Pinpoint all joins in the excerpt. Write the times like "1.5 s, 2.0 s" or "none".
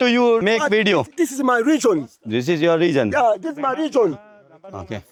none